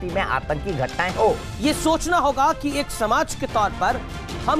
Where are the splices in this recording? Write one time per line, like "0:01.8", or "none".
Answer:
0:01.5